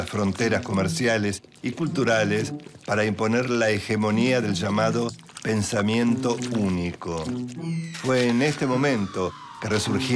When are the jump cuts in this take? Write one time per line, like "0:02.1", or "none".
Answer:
0:01.0